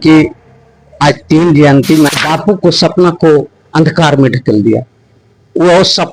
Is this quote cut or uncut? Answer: cut